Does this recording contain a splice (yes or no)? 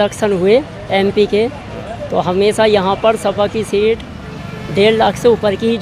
no